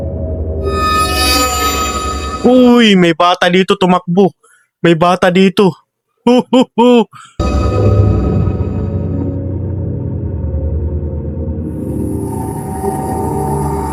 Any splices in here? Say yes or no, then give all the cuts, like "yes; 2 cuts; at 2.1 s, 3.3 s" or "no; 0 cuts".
no; 0 cuts